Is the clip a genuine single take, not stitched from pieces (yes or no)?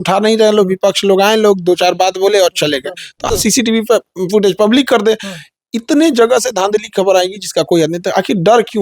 no